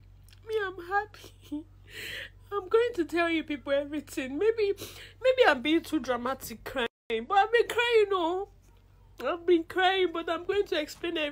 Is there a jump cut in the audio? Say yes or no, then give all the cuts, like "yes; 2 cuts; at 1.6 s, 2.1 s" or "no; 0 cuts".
no; 0 cuts